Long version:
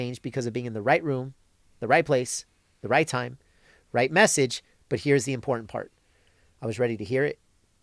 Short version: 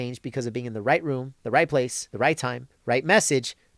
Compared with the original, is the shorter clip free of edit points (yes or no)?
no